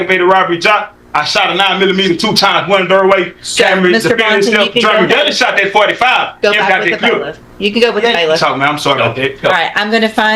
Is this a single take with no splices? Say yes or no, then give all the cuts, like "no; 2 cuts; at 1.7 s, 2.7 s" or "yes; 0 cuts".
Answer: yes; 0 cuts